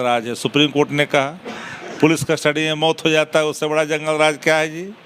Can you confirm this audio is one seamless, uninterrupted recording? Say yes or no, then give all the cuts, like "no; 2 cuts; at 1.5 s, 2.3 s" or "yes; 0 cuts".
yes; 0 cuts